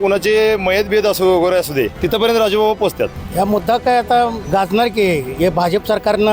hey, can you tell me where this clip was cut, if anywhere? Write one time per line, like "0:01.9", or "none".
0:02.0
0:03.2
0:04.4